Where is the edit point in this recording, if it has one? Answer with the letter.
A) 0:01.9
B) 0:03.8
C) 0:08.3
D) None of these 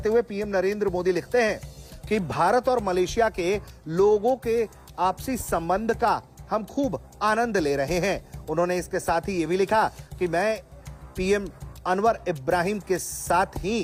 D